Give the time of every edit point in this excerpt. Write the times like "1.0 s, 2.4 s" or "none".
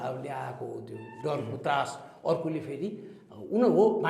none

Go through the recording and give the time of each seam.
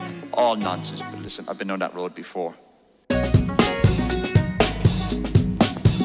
3.0 s

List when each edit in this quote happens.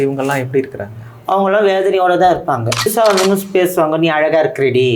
2.9 s

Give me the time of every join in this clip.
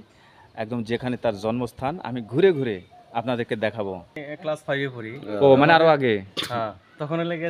4.2 s

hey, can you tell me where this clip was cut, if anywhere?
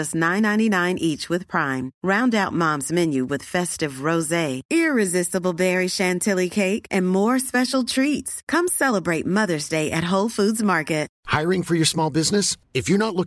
11.2 s

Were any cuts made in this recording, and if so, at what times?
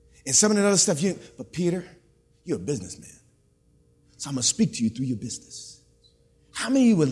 none

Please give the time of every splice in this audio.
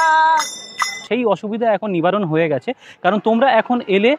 1.0 s

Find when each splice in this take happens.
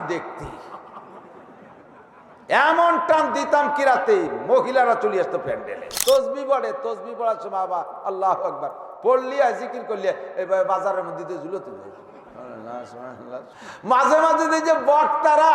5.9 s, 13.5 s

